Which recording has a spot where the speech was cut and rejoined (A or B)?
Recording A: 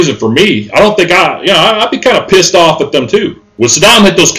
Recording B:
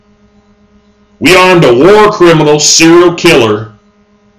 A